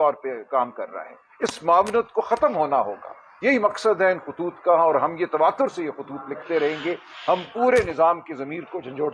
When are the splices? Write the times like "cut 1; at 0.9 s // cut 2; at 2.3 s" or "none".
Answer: none